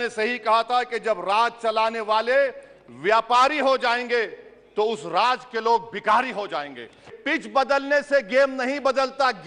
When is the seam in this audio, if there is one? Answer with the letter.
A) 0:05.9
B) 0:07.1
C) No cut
B